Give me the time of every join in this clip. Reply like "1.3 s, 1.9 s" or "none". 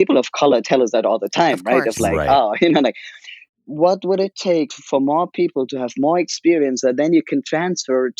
3.5 s, 4.8 s